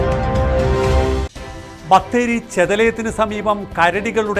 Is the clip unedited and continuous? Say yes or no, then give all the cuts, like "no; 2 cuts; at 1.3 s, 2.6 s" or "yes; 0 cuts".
yes; 0 cuts